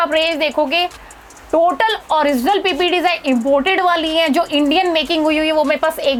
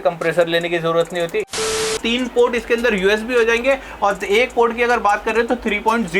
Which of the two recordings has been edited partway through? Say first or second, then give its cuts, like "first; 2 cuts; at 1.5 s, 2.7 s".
second; 1 cut; at 1.6 s